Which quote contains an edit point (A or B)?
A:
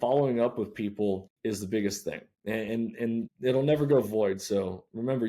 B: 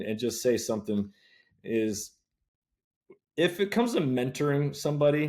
A